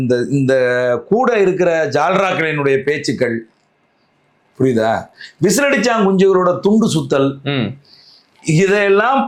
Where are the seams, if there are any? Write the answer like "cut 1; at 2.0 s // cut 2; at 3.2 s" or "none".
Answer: none